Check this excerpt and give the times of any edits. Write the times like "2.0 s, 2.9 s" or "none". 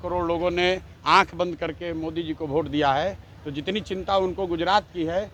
none

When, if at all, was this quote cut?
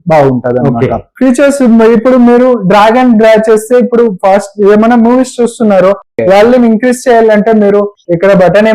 1.1 s

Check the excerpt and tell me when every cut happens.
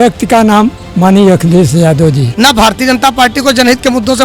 2.2 s

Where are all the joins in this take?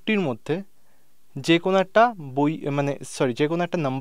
none

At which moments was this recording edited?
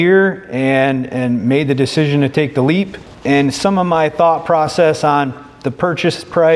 3.1 s

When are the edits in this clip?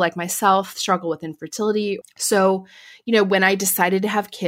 2.1 s

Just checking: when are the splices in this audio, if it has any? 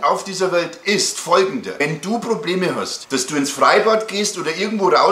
1.8 s, 2.9 s

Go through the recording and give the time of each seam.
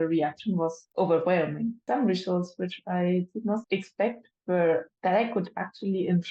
3.6 s

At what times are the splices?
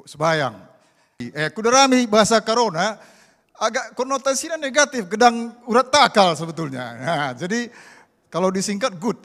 1.3 s

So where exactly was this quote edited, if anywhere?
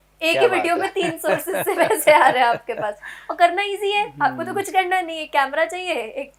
none

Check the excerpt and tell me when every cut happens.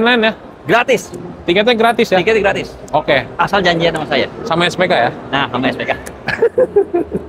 none

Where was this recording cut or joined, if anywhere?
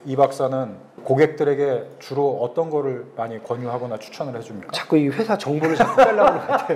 1.0 s

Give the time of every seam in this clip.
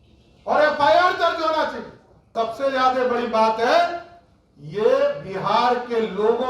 2.3 s

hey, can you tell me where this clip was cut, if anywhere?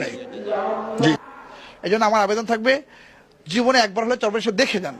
1.2 s

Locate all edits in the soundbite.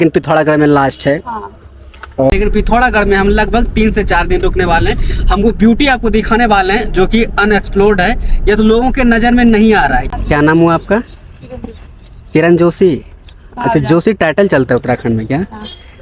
2.3 s, 10.1 s

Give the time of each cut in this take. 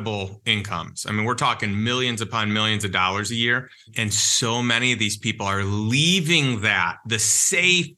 none

